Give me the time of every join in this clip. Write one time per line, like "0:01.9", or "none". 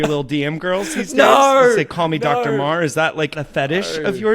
0:03.4